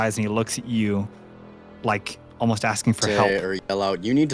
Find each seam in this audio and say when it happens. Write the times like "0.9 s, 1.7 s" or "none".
3.0 s